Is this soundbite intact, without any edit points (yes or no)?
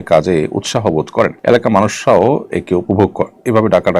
no